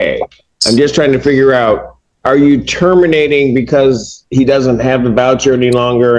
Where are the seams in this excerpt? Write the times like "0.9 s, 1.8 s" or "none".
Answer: none